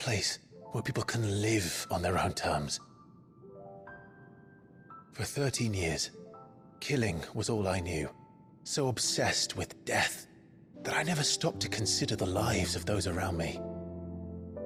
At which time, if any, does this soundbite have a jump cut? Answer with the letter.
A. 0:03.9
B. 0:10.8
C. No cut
C